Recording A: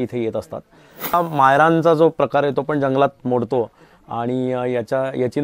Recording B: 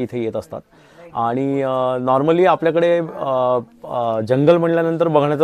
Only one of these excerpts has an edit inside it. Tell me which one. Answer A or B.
A